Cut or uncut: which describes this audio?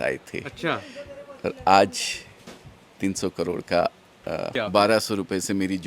cut